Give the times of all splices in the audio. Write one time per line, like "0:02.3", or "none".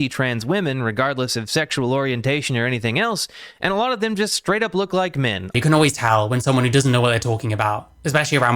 0:05.5